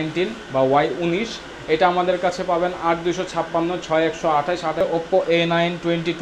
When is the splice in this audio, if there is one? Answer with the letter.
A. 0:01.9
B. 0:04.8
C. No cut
B